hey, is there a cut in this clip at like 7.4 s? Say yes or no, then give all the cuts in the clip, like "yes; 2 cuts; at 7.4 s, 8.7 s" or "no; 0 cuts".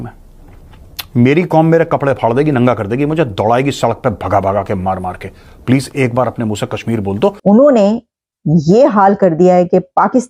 yes; 1 cut; at 7.4 s